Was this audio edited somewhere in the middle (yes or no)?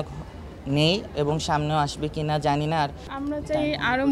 yes